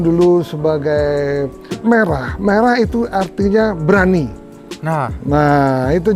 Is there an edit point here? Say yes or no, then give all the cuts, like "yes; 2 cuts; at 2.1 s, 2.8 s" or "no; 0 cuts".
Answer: yes; 1 cut; at 1.8 s